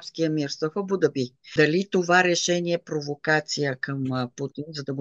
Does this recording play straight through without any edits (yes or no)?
no